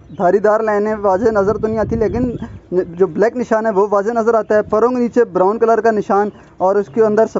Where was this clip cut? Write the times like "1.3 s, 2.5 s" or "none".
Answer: none